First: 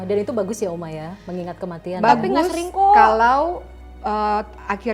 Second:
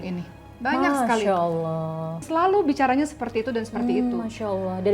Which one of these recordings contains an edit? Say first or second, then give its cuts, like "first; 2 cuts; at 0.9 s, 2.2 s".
second; 1 cut; at 2.3 s